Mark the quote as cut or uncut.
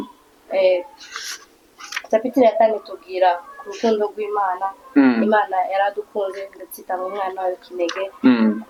uncut